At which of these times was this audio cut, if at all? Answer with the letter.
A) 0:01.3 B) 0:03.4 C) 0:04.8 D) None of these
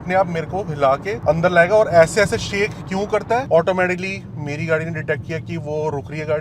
B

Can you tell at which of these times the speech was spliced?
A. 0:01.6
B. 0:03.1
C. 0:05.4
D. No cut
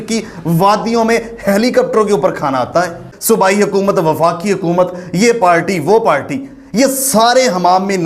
B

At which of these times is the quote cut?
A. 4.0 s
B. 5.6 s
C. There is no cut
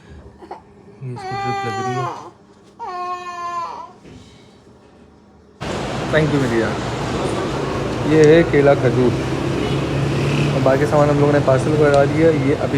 B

